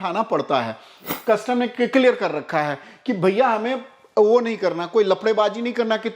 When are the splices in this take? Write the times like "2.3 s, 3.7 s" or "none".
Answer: 1.0 s